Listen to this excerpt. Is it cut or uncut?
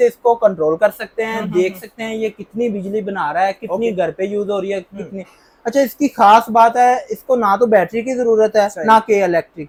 uncut